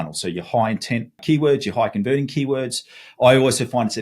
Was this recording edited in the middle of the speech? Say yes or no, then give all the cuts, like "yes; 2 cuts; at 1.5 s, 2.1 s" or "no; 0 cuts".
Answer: yes; 1 cut; at 1.2 s